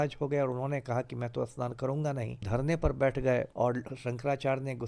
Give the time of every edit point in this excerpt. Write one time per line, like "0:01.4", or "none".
0:02.5
0:03.5